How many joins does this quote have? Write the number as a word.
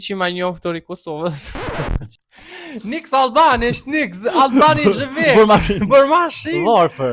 one